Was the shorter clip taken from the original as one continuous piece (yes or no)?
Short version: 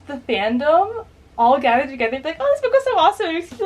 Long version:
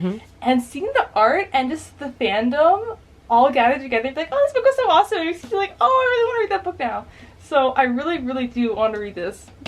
yes